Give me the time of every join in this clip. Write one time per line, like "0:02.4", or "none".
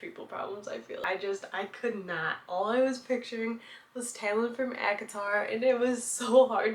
0:01.0

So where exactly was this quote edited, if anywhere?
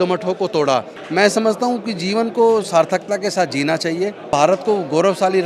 0:01.0
0:04.3

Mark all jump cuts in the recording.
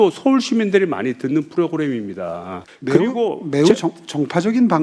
0:02.6

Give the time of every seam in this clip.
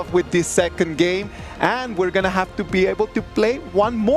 none

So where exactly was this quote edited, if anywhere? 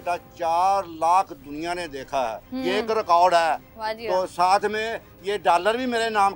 none

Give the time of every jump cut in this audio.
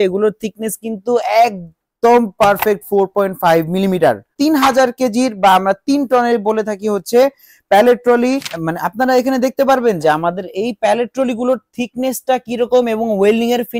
0:04.3
0:08.5

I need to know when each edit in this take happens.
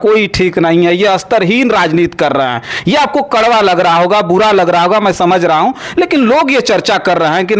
none

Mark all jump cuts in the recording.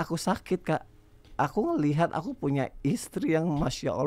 none

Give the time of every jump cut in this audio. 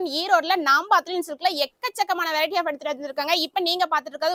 none

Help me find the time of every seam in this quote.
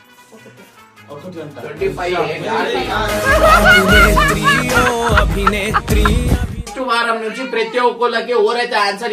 0:06.7

